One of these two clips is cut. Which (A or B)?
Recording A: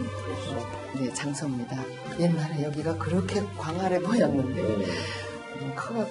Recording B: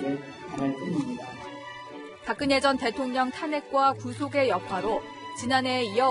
B